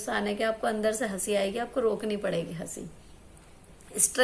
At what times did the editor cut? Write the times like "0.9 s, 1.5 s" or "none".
none